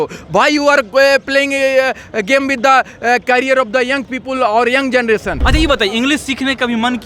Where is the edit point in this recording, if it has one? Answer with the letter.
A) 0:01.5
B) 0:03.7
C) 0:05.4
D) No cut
C